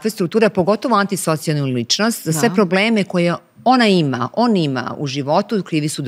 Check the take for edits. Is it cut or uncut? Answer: uncut